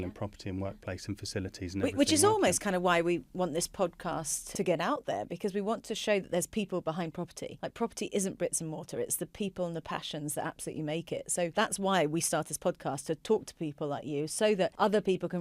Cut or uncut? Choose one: uncut